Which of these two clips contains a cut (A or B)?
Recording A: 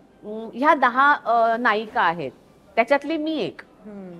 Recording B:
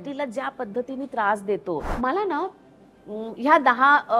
B